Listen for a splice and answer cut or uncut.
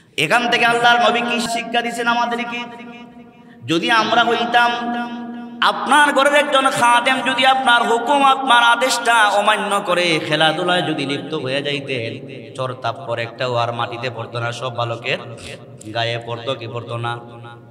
cut